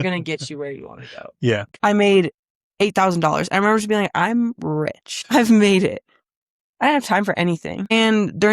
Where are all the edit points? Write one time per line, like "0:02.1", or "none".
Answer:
0:01.7